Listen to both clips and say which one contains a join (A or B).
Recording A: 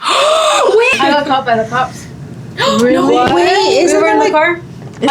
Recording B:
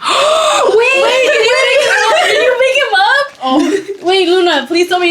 A